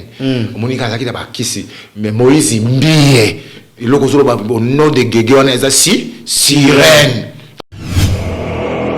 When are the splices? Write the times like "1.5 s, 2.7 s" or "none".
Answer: 7.6 s